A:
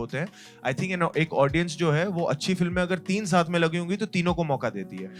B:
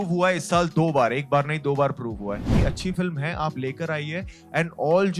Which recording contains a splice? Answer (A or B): B